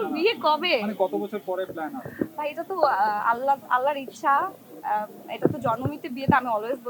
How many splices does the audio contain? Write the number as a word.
zero